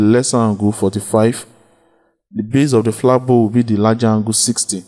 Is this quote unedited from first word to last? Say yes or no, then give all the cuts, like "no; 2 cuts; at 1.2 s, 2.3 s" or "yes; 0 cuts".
yes; 0 cuts